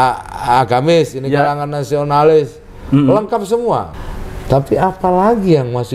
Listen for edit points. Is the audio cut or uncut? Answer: cut